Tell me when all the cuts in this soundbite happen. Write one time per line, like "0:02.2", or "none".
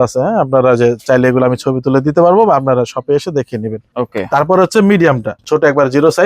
0:03.9
0:05.4